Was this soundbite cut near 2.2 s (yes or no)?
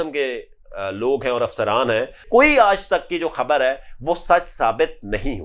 yes